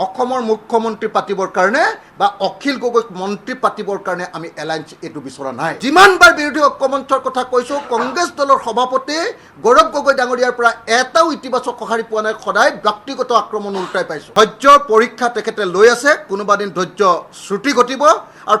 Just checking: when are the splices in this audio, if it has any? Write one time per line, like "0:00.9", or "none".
0:05.8
0:14.2